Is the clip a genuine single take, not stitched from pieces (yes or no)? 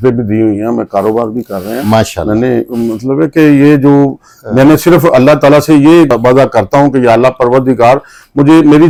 yes